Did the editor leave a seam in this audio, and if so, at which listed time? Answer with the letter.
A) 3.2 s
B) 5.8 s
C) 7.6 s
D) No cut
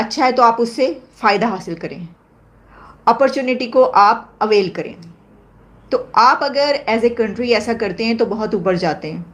D